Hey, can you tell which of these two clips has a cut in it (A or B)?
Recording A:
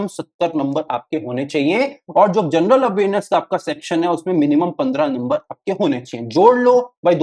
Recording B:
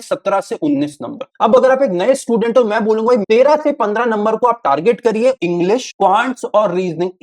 B